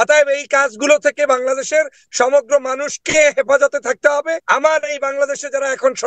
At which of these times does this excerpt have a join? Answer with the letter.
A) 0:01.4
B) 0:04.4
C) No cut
B